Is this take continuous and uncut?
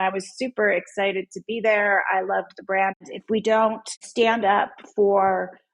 no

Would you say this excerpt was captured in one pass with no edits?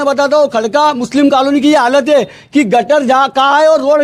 yes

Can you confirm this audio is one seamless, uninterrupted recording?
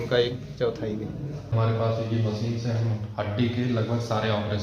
no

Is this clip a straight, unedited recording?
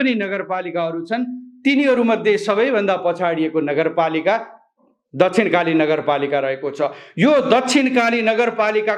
yes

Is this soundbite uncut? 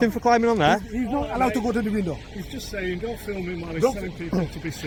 yes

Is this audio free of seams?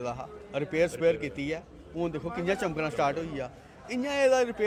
yes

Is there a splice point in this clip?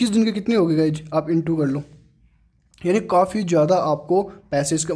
no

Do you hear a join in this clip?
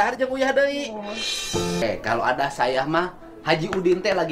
yes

